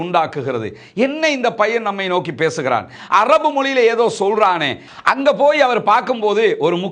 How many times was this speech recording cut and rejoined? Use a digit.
1